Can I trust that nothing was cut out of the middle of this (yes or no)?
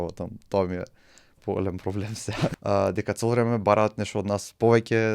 no